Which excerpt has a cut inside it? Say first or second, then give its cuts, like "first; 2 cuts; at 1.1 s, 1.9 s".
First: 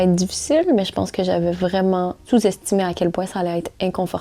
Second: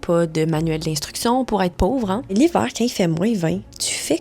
second; 1 cut; at 2.3 s